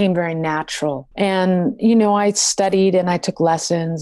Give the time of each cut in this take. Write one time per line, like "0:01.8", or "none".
0:01.1